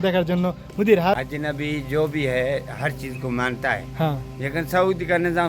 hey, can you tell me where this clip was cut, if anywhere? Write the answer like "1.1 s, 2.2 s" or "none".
1.1 s